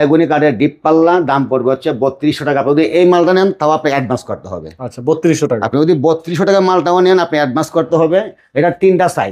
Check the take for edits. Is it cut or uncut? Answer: uncut